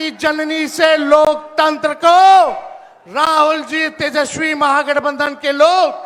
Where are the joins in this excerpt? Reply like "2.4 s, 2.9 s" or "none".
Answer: none